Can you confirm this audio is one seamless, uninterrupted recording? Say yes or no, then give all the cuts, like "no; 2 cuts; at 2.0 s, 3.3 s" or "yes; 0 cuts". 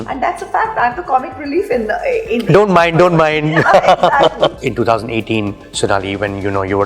no; 1 cut; at 4.6 s